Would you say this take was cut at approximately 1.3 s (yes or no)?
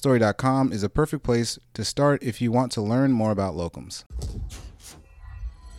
no